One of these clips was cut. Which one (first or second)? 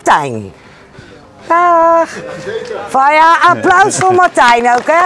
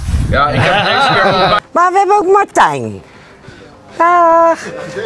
second